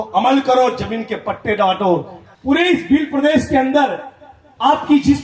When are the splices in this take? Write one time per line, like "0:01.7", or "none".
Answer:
0:02.2